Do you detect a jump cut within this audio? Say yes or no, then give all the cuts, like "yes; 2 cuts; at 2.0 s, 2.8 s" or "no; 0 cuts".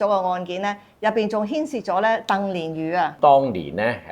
yes; 1 cut; at 3.2 s